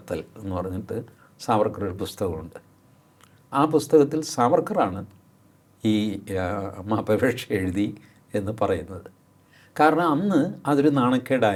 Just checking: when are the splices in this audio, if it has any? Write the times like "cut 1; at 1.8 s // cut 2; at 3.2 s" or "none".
none